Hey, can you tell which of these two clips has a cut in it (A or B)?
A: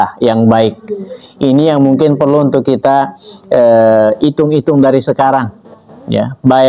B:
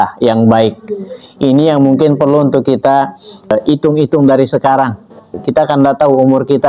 B